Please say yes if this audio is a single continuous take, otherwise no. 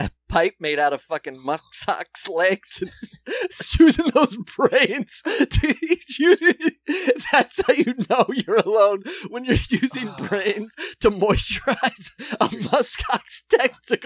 yes